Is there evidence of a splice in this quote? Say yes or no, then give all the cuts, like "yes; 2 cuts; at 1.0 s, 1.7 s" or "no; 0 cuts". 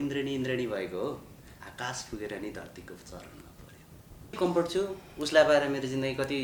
yes; 1 cut; at 4.4 s